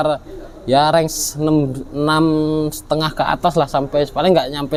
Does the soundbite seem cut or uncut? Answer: uncut